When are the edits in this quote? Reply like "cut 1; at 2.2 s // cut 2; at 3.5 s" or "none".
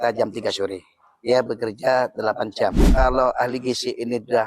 cut 1; at 2.9 s